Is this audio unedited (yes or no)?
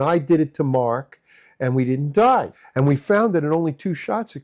no